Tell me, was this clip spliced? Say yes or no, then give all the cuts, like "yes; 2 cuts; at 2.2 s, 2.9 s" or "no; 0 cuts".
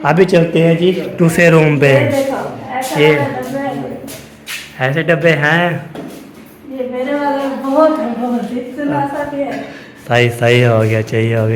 no; 0 cuts